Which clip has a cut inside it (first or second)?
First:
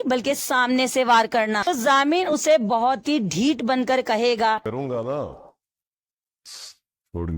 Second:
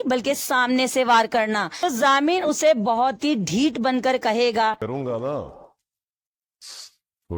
first